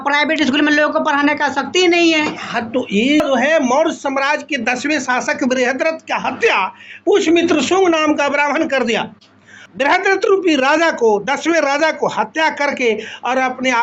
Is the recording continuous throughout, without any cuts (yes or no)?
no